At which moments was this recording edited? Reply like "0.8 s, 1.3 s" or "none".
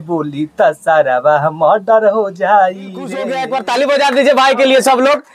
3.3 s